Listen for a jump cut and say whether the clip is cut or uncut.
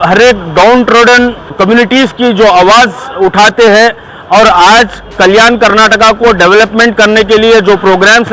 cut